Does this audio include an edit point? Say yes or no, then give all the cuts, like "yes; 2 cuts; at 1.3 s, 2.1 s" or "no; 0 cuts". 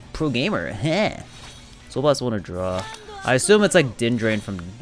no; 0 cuts